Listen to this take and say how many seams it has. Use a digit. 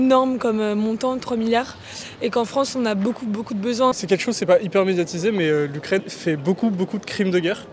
2